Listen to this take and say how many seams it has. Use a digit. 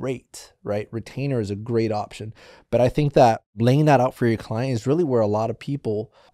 1